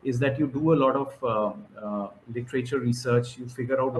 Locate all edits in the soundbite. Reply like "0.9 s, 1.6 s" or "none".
none